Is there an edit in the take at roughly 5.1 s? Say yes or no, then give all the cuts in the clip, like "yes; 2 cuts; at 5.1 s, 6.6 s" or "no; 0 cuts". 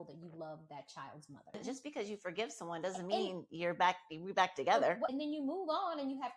yes; 2 cuts; at 1.6 s, 5.1 s